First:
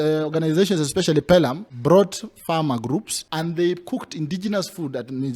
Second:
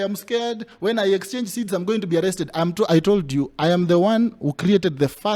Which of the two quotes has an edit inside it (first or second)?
first